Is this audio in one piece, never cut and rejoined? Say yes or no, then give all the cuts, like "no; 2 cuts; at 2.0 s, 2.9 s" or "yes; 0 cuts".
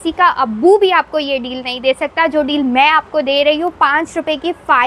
yes; 0 cuts